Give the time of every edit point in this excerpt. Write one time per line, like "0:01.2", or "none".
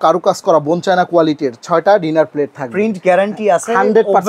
none